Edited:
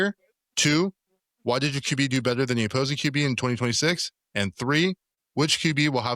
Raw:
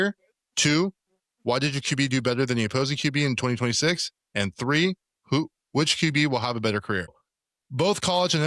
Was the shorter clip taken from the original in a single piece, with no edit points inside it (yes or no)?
no